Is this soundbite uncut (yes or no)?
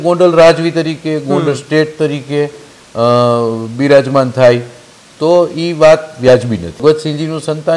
no